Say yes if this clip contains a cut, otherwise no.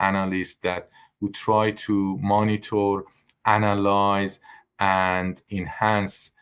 yes